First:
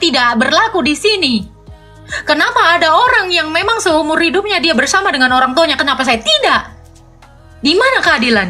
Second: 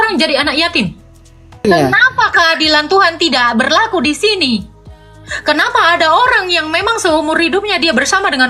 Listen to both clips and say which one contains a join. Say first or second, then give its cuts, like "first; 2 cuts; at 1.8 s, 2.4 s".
second; 1 cut; at 1.7 s